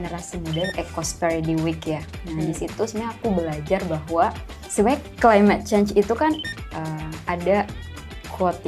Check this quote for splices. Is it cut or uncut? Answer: cut